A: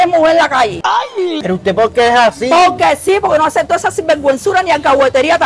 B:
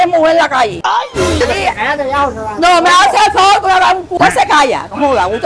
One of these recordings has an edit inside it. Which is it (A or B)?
B